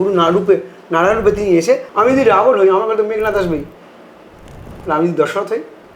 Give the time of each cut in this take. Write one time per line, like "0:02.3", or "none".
0:01.9